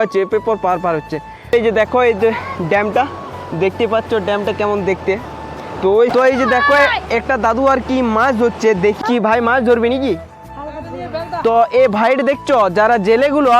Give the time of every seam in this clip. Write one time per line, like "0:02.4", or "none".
0:01.5
0:06.1
0:09.0